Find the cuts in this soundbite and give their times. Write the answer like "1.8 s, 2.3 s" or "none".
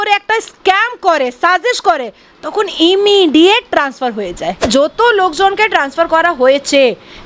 4.6 s